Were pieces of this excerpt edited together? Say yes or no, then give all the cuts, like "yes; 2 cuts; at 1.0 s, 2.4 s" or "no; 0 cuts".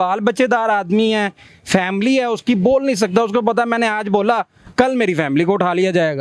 no; 0 cuts